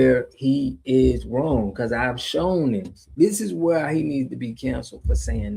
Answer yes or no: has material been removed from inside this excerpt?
yes